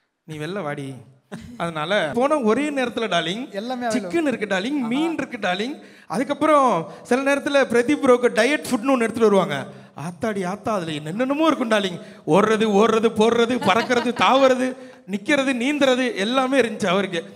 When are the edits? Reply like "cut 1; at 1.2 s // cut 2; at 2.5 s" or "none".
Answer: cut 1; at 2.1 s